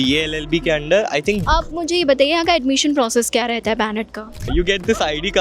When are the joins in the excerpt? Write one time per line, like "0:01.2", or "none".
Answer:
0:01.4
0:04.5